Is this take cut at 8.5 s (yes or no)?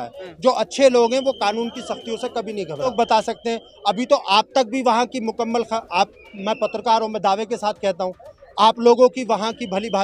no